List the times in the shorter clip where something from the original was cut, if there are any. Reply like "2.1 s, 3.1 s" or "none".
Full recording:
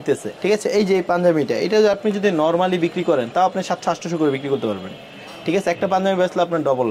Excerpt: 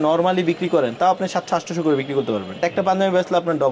2.6 s